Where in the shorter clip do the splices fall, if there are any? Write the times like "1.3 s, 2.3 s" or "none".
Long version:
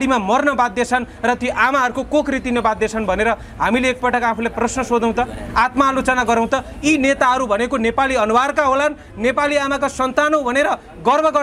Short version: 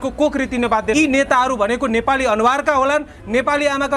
0.9 s

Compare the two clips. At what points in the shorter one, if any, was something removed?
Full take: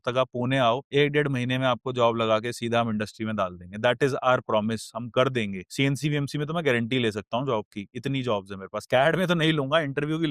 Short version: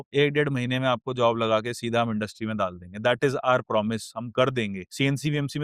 none

